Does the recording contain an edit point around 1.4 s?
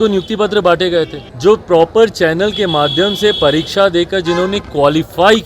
yes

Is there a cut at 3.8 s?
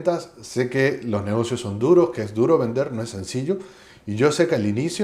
no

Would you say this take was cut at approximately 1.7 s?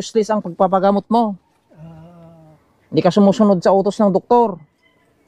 no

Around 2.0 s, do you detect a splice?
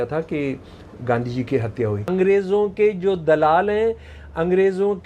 yes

